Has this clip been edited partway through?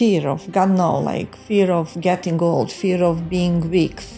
no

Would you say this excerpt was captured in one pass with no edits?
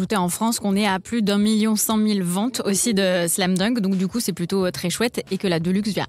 yes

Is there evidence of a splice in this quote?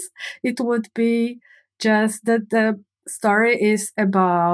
no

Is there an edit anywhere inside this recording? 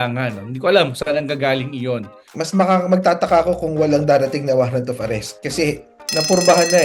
yes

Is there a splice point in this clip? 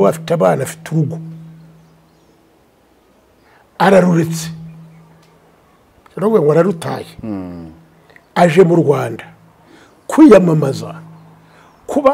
no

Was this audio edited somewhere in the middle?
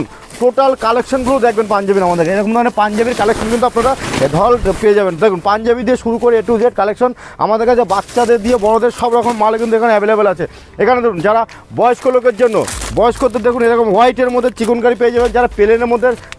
no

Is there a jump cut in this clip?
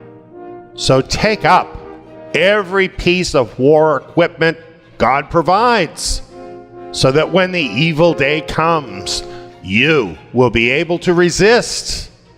no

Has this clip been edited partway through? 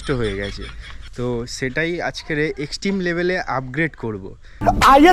no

